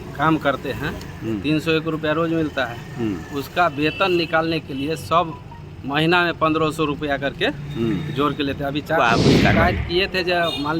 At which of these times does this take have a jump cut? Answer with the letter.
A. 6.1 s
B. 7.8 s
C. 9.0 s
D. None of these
C